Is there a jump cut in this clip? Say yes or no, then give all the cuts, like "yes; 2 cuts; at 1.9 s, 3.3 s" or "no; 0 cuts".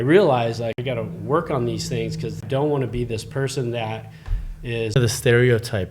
yes; 3 cuts; at 0.8 s, 2.4 s, 5.0 s